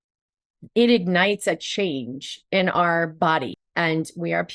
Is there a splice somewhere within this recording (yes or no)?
yes